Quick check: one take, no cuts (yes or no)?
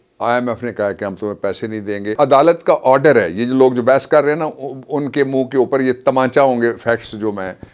no